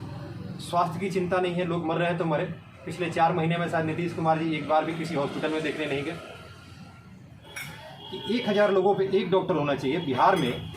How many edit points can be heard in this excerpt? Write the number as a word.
one